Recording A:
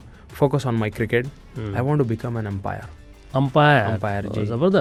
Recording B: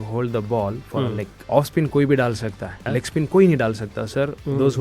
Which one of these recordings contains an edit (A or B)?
B